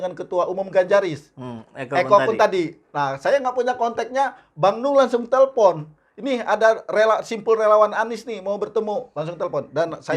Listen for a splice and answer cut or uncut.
uncut